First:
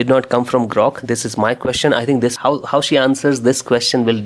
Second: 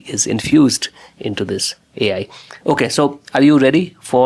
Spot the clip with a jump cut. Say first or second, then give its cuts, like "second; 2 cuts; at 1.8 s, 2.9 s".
first; 1 cut; at 2.4 s